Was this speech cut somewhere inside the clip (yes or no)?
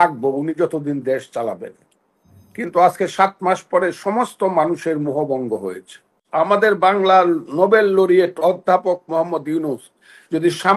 yes